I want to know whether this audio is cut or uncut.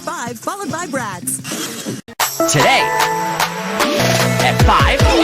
cut